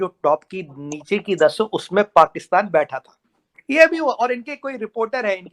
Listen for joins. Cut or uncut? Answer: uncut